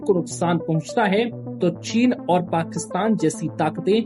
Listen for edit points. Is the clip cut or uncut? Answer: uncut